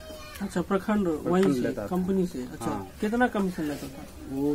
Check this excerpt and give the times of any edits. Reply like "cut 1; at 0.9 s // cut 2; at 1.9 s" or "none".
none